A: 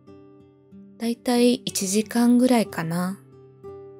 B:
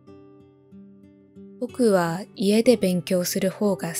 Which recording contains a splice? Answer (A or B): B